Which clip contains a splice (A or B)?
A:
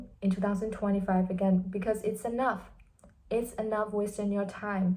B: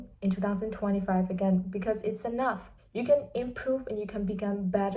B